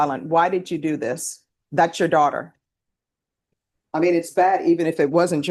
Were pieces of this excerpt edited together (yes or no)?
no